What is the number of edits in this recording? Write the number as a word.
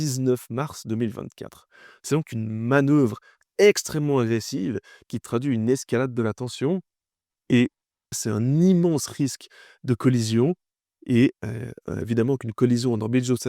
one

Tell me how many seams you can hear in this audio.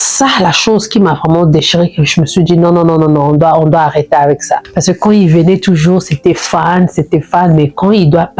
one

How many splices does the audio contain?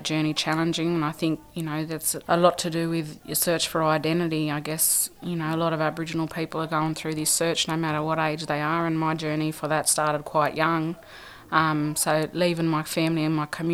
zero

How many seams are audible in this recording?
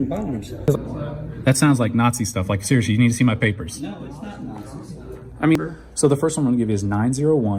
two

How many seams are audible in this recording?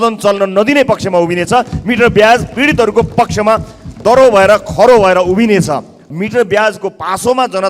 one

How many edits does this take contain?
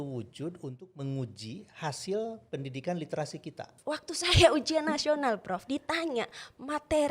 one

